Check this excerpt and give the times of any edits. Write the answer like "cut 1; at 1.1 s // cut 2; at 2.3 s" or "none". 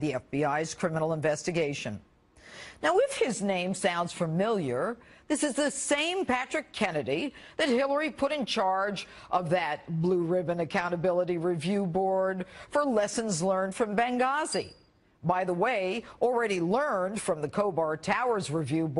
cut 1; at 2.4 s